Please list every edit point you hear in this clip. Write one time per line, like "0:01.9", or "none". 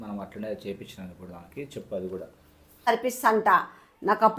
0:02.8